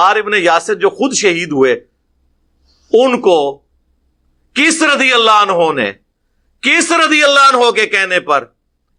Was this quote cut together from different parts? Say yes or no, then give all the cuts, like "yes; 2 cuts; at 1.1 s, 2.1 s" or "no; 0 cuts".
no; 0 cuts